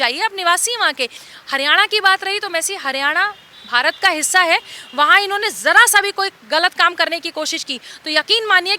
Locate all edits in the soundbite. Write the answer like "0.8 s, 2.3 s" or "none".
1.2 s